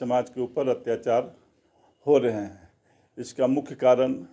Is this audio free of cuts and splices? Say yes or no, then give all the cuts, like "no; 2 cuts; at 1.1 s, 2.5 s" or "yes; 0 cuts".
yes; 0 cuts